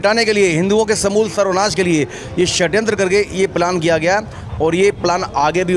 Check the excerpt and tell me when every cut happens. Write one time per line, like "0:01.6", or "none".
none